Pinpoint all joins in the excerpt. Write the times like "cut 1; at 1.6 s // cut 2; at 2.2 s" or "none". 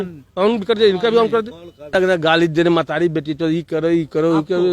cut 1; at 1.9 s